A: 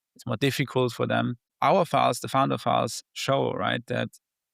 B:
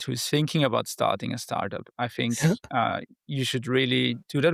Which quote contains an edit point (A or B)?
A